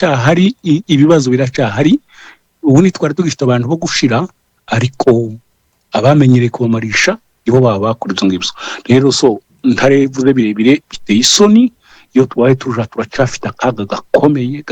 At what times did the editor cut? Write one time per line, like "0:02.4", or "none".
none

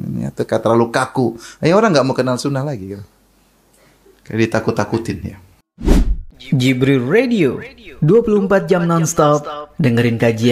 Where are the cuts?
0:05.8

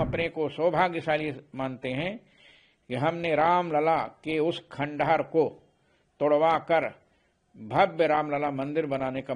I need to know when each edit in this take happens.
none

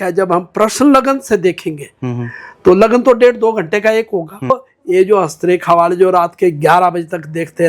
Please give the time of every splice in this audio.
0:04.5

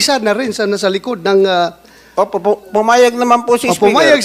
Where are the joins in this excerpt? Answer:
none

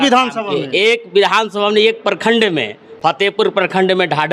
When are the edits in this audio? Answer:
none

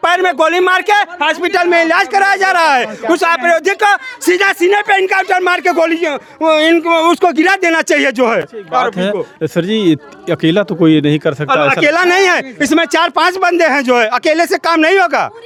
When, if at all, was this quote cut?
none

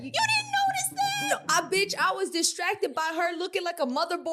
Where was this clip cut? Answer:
none

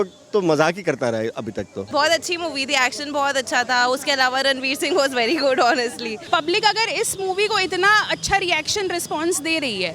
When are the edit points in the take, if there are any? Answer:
0:01.9
0:06.1

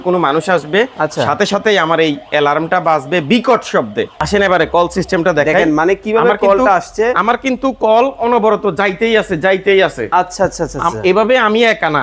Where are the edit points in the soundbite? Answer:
0:04.1

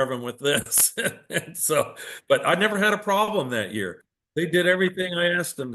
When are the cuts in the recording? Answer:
0:04.6

